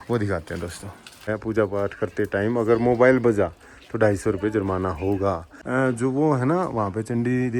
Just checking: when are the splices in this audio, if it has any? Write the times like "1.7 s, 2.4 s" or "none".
1.3 s, 5.5 s